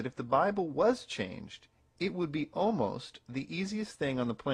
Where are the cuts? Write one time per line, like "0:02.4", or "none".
none